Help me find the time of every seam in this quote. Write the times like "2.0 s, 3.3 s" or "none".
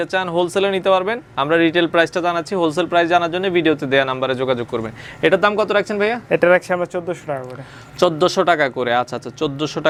none